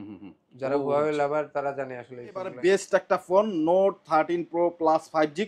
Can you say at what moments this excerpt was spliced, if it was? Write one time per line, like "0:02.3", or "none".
0:02.5